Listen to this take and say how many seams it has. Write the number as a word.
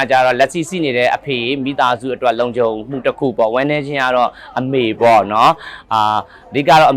zero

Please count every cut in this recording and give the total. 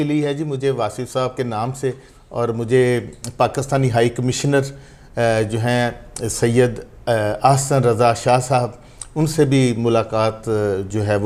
zero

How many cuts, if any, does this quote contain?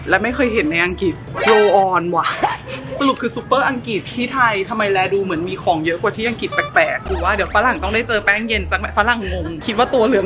two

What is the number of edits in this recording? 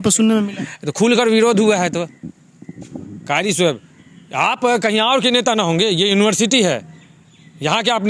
zero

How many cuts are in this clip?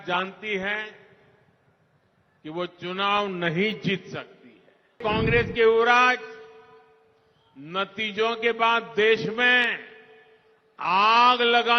one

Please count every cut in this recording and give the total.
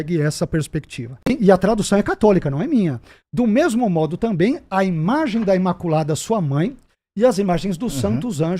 one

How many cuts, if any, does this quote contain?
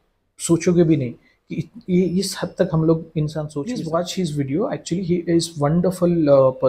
one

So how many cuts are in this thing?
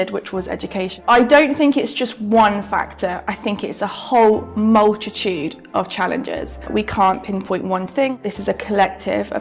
three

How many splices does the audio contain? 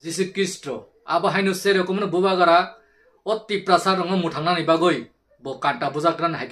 one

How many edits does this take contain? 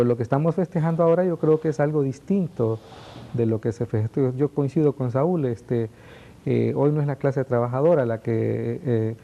one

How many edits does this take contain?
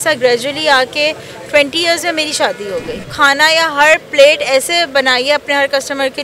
one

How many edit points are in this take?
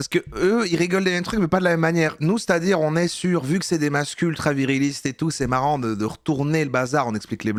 zero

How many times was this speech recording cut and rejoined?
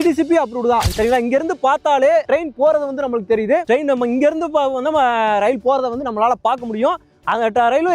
one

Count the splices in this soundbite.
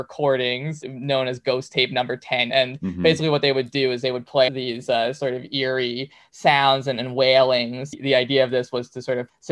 three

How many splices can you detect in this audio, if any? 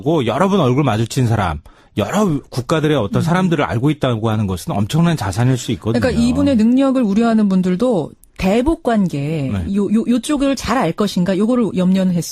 one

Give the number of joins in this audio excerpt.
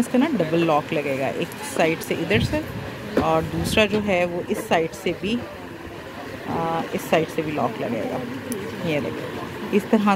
zero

